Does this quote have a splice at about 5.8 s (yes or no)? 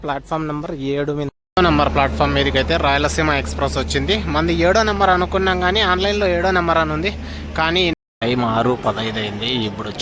no